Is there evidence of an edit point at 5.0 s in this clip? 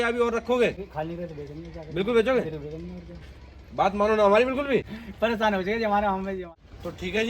yes; 3 cuts; at 0.8 s, 5.0 s, 6.5 s

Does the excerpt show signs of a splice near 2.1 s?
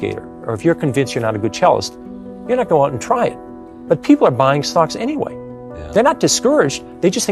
no; 0 cuts

